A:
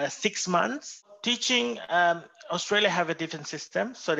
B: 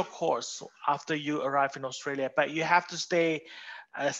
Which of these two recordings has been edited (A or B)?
A